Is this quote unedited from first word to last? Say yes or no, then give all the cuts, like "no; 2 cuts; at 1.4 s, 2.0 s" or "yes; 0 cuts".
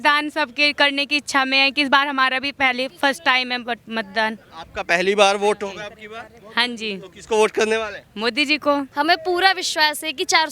no; 1 cut; at 8.9 s